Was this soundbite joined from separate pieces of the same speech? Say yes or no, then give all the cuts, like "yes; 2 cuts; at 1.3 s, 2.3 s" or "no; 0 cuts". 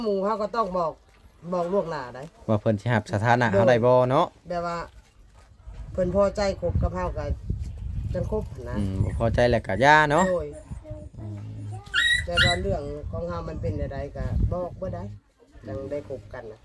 no; 0 cuts